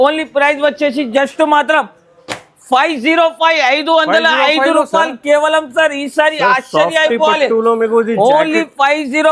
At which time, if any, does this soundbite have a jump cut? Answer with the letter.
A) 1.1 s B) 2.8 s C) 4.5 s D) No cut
D